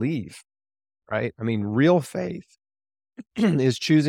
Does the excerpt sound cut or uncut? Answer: uncut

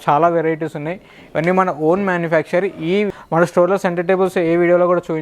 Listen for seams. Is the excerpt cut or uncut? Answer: cut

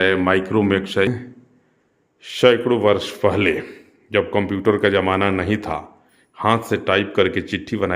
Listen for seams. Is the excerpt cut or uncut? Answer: cut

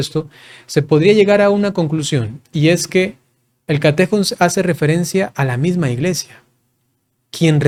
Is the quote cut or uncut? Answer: uncut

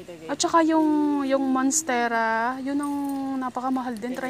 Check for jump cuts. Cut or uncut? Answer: uncut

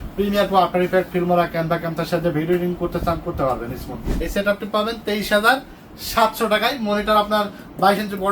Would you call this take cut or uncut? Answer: cut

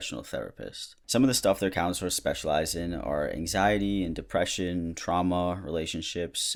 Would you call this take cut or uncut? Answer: uncut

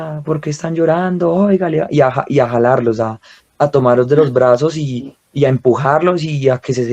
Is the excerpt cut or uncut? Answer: uncut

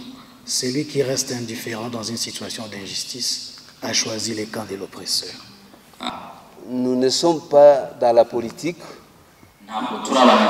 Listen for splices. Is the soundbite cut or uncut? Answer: cut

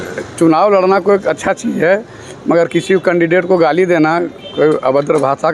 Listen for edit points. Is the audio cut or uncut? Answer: uncut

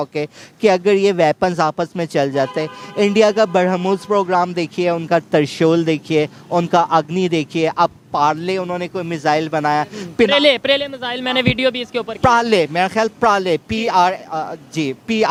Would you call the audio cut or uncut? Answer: uncut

